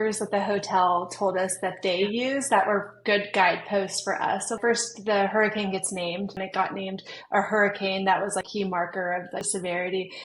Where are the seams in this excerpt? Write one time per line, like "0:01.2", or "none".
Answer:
0:04.6
0:06.4
0:08.5
0:09.5